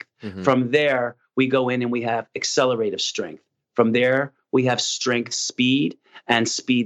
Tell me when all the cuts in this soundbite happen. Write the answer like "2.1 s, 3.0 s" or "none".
none